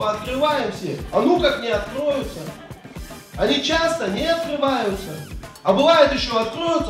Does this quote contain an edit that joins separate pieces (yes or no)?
no